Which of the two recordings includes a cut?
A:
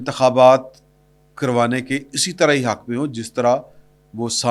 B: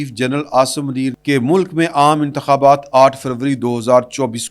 B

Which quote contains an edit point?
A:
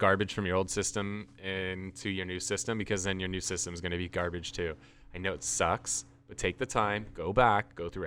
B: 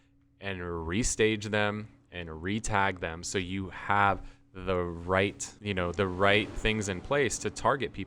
B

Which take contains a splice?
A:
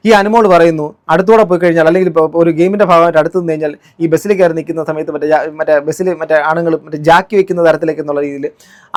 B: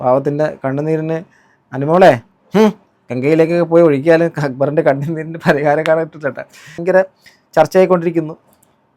B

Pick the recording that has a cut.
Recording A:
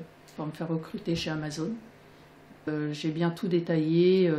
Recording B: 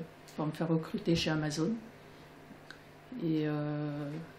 A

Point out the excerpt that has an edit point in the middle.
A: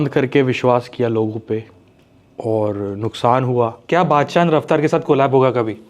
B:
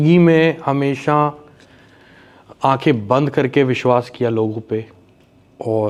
A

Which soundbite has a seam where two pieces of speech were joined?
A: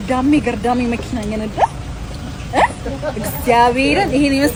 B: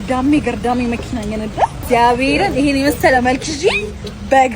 B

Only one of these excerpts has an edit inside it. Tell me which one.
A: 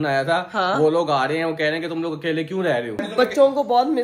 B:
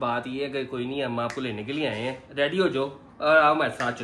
A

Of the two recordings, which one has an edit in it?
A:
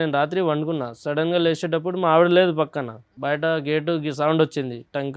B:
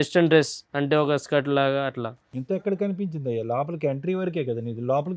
A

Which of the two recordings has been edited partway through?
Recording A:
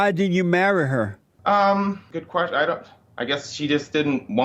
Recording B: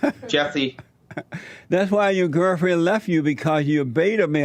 A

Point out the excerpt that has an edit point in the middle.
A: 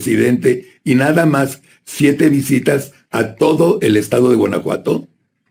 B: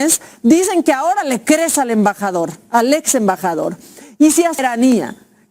B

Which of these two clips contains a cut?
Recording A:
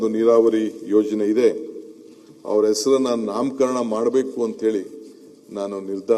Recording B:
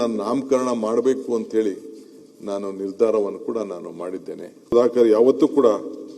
B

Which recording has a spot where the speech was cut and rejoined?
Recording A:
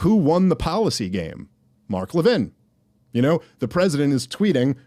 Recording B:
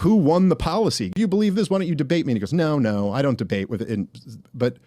B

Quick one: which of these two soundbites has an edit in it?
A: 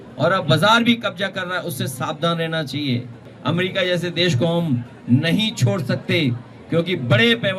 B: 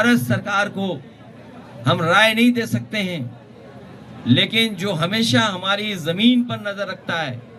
A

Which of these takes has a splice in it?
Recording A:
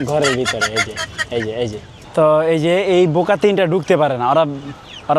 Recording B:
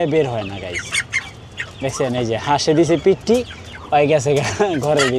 A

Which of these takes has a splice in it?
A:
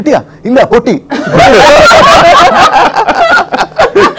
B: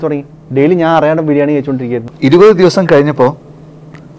B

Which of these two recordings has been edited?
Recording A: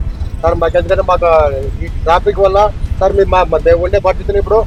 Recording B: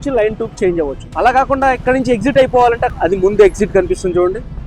B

